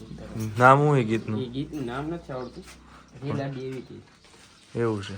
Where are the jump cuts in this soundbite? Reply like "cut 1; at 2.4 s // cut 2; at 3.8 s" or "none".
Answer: cut 1; at 2.9 s